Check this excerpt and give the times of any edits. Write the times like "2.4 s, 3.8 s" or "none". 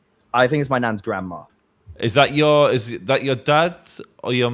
1.4 s

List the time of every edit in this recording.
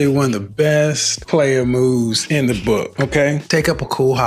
none

